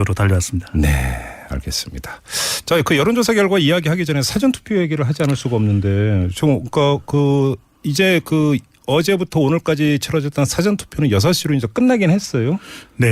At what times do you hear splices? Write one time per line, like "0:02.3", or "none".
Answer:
0:04.1